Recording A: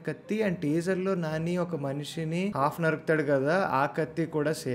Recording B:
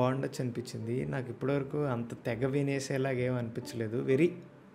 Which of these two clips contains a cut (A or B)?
A